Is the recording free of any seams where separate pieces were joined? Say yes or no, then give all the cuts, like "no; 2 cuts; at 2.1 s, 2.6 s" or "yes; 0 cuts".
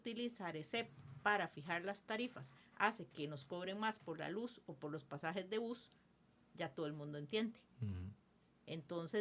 yes; 0 cuts